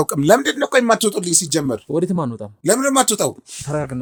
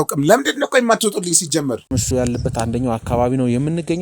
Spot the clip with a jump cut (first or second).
second